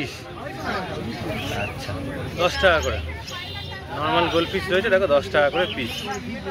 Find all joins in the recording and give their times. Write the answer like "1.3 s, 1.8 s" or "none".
none